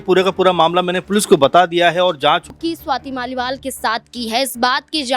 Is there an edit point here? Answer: yes; 1 cut; at 2.5 s

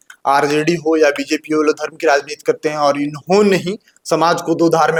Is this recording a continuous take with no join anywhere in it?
yes; 0 cuts

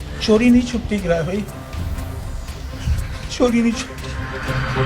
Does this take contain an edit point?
no; 0 cuts

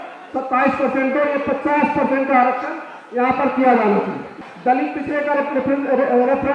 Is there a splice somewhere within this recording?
yes; 1 cut; at 4.3 s

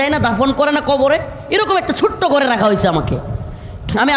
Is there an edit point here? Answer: no; 0 cuts

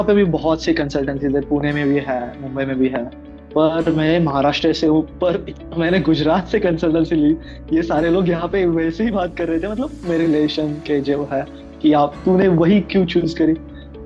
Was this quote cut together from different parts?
no; 0 cuts

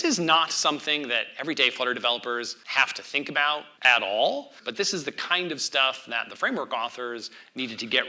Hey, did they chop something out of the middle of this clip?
yes; 3 cuts; at 2.6 s, 3.7 s, 4.6 s

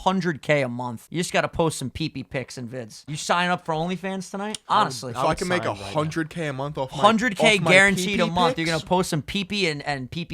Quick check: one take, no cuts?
no; 3 cuts; at 1.0 s, 3.1 s, 4.6 s

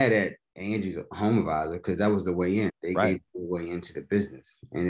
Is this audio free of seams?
no; 1 cut; at 2.8 s

